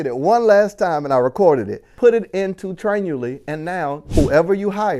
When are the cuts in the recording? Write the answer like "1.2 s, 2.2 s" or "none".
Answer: 1.8 s, 4.0 s